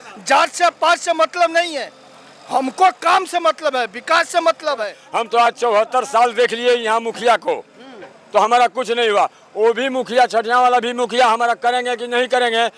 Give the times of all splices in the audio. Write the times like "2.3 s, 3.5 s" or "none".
5.0 s